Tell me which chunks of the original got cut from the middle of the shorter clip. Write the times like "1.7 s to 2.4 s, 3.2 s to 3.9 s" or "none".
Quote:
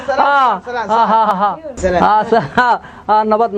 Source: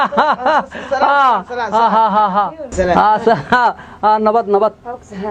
2.1 s to 2.2 s